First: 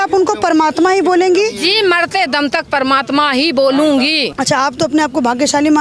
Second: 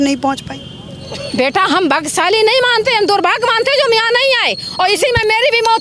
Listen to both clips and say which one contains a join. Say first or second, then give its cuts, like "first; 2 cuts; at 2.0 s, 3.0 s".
first; 1 cut; at 4.3 s